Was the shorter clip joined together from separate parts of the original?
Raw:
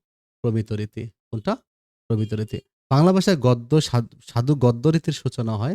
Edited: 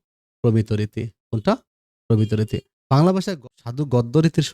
yes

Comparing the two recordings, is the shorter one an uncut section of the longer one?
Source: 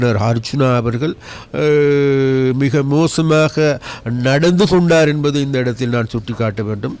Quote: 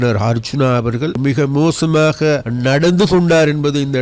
no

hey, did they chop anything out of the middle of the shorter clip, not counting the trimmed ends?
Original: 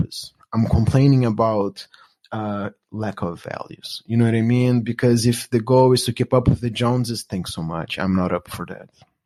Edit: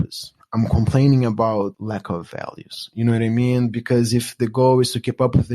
yes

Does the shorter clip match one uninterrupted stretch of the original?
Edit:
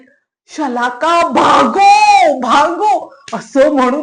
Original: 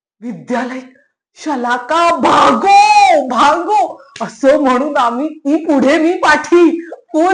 yes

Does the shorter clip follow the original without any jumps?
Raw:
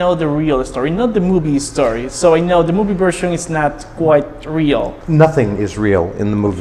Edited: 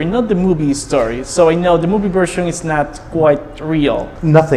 yes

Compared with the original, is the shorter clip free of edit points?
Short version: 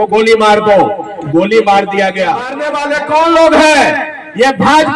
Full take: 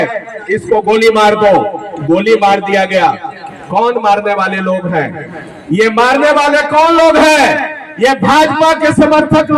no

